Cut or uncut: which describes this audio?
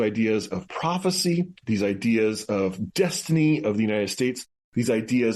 uncut